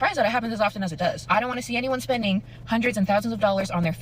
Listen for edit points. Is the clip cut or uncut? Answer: cut